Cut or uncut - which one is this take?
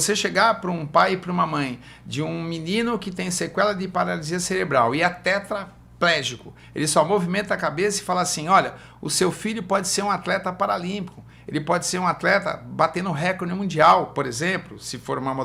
uncut